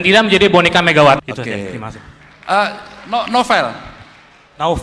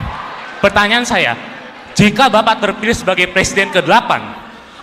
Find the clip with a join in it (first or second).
first